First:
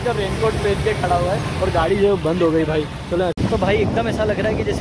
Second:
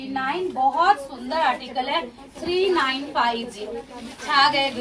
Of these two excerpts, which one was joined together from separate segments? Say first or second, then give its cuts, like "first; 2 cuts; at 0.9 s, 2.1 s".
first; 1 cut; at 3.3 s